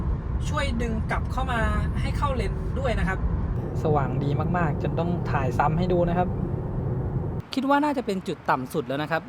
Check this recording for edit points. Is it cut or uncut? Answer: cut